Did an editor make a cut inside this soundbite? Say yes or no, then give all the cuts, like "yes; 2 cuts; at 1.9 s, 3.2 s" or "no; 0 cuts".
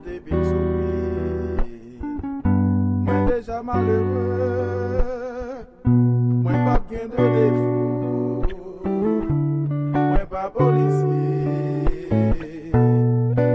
yes; 1 cut; at 12.6 s